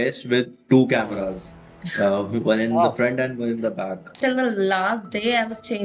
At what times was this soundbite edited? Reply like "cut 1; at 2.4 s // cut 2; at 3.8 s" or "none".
cut 1; at 4.2 s

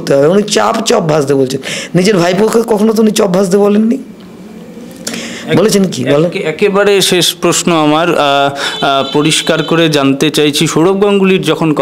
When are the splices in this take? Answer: none

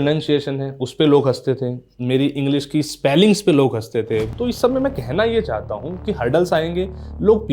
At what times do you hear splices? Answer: cut 1; at 4.3 s

